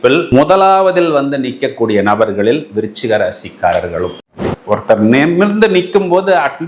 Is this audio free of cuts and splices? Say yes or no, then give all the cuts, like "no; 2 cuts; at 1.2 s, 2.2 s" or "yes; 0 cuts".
no; 1 cut; at 4.3 s